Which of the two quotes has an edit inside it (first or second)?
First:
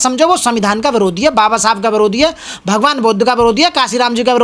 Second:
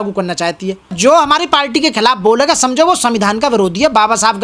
second